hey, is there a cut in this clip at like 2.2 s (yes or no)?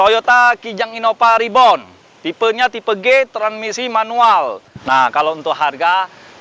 no